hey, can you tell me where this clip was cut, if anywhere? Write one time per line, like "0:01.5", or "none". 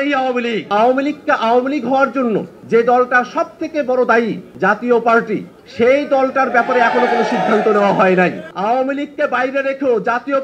0:00.7
0:02.5
0:04.4
0:05.6
0:08.5